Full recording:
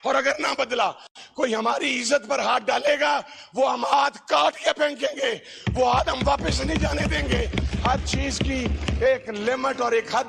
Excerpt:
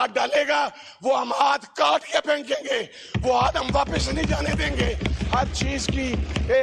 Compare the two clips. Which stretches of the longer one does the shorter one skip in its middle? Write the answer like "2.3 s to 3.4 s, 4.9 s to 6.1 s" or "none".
none